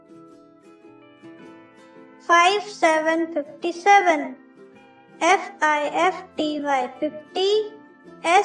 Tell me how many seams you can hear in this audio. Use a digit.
1